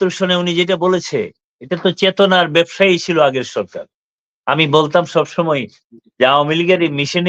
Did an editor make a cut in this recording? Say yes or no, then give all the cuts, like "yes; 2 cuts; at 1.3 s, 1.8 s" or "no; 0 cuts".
no; 0 cuts